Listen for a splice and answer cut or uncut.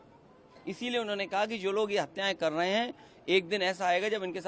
uncut